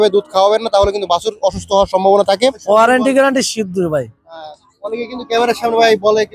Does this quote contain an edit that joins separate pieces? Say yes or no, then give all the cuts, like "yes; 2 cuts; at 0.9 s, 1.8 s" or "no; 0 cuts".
yes; 1 cut; at 2.6 s